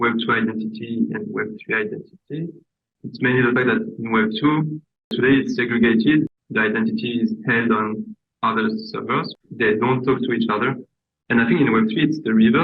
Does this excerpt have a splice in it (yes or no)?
yes